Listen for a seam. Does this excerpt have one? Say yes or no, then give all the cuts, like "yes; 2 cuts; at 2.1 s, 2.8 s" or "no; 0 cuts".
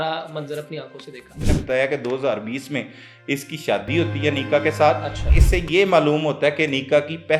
yes; 2 cuts; at 1.4 s, 5.2 s